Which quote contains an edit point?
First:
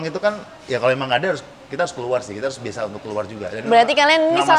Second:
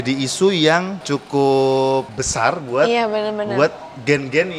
second; 2 cuts; at 1.0 s, 2.2 s

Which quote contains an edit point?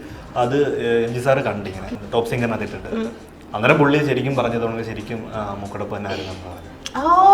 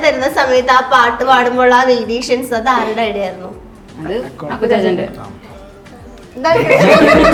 first; 1 cut; at 1.9 s

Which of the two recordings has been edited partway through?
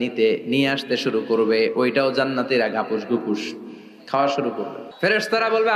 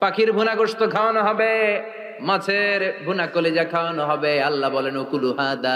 first; 1 cut; at 4.8 s

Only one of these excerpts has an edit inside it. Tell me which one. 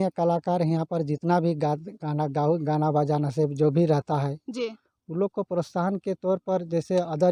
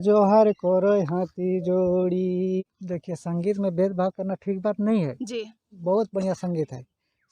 second; 1 cut; at 2.6 s

